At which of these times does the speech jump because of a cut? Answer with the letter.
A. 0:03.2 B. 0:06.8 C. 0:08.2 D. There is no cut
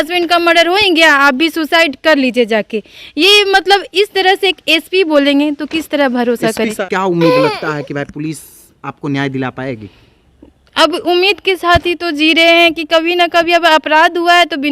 B